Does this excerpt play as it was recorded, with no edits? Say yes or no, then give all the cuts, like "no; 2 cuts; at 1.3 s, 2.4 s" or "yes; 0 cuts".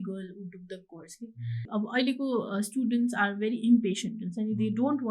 no; 1 cut; at 1.7 s